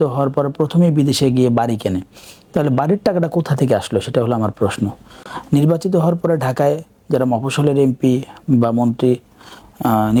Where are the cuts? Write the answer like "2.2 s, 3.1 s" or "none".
none

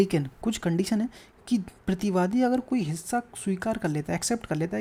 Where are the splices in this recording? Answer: none

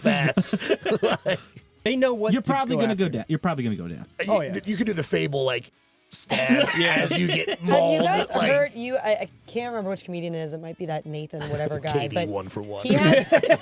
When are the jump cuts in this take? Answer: 1.7 s

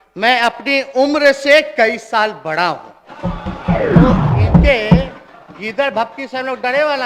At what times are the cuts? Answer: 4.3 s

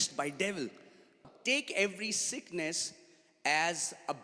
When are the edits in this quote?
1.2 s

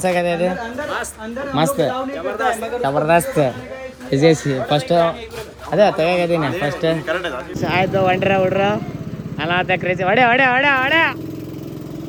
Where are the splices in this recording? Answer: none

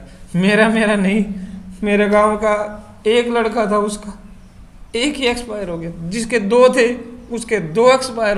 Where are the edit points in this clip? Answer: none

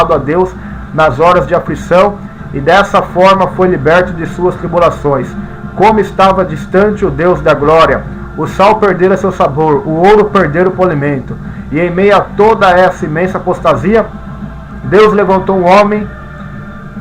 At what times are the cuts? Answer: 14.6 s

